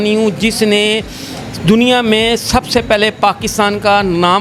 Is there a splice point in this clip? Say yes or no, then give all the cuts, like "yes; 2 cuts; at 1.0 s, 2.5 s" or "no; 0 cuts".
no; 0 cuts